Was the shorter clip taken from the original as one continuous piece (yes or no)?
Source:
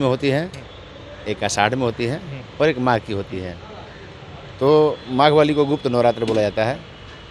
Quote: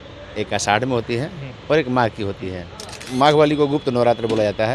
no